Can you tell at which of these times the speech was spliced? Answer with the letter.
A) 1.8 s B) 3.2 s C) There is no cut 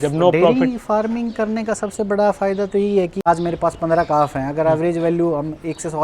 B